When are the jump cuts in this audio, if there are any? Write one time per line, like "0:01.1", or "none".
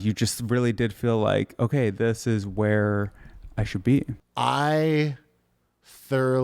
0:04.2